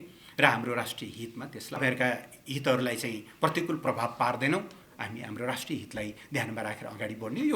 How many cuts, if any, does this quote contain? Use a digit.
1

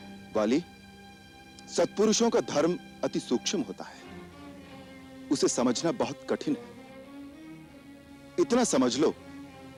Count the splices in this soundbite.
0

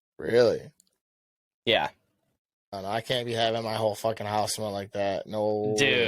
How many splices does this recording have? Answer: 1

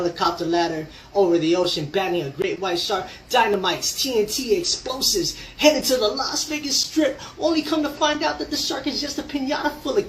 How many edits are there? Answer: 1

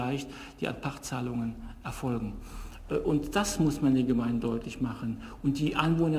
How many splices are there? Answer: 0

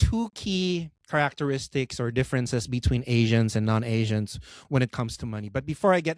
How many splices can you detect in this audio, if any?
0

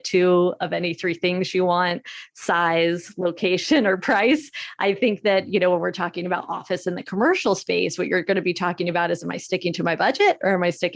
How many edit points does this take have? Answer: 0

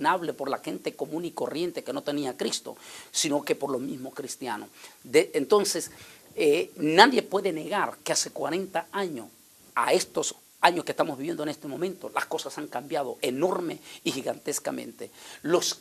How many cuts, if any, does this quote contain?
1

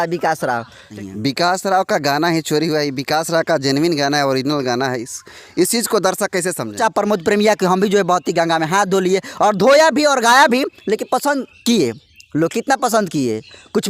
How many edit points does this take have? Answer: 2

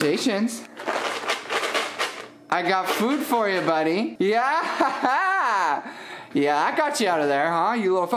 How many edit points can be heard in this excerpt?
1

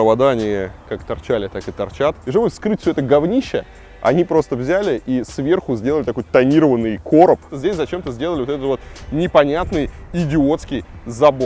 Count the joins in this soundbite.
2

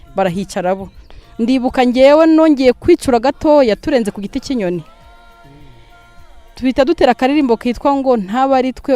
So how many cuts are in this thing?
1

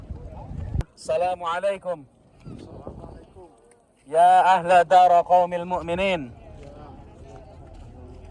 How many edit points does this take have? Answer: 1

